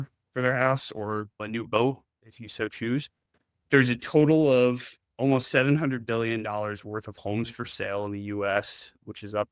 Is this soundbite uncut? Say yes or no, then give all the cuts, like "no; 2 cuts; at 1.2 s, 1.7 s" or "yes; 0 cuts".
no; 1 cut; at 3.6 s